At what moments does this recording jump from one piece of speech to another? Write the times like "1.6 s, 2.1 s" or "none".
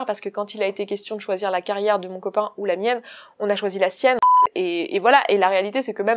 4.5 s